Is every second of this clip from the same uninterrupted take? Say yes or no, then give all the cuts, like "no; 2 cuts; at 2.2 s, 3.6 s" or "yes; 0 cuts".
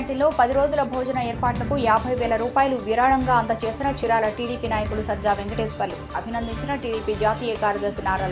yes; 0 cuts